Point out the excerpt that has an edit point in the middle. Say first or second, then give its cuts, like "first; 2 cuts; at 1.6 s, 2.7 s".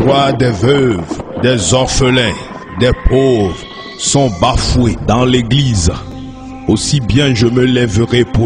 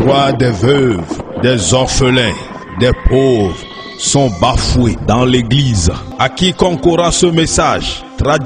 second; 1 cut; at 6.1 s